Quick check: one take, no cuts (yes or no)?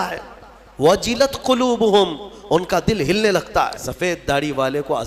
no